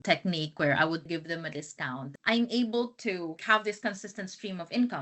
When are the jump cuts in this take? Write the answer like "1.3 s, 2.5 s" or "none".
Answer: 1.0 s, 2.1 s, 3.4 s